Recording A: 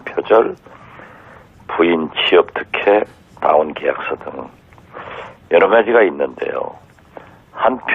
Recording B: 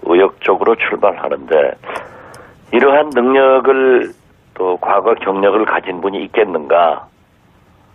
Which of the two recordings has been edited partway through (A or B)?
A